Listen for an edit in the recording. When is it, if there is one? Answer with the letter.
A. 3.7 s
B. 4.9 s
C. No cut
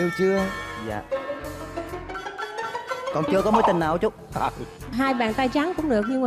B